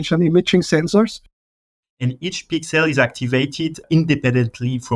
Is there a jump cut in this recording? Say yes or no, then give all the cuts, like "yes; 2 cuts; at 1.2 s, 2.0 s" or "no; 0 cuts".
yes; 2 cuts; at 1.6 s, 3.8 s